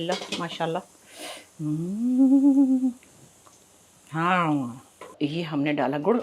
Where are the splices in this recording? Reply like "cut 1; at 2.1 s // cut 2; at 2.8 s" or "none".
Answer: cut 1; at 5.1 s